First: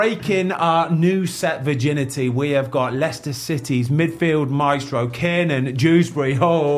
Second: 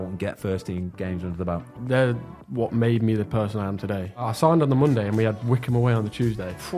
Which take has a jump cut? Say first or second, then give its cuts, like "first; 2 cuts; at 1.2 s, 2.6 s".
second; 2 cuts; at 1.8 s, 4.3 s